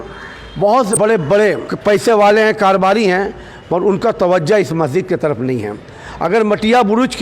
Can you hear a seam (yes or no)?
yes